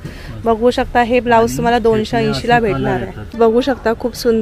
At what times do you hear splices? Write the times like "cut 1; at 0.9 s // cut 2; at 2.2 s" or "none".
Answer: cut 1; at 3.3 s

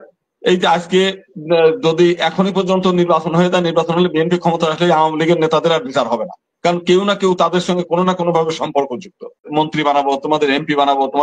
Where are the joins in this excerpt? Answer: cut 1; at 9.4 s

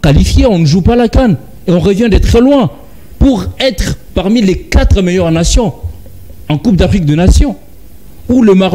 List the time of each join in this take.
none

